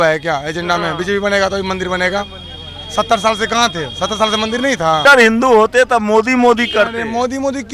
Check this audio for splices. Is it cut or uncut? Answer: cut